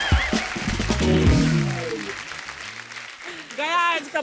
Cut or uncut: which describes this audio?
uncut